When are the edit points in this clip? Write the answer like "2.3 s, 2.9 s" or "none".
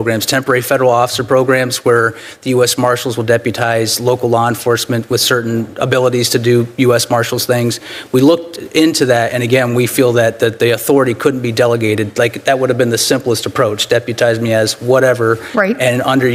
none